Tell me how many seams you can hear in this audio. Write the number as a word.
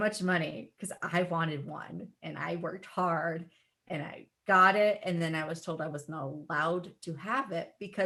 zero